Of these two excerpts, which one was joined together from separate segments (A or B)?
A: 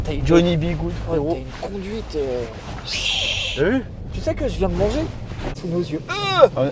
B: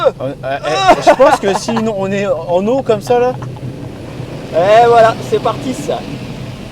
A